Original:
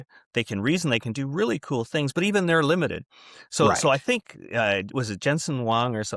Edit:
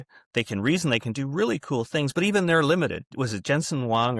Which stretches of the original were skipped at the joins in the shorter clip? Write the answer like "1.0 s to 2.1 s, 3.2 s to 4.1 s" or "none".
3.2 s to 4.9 s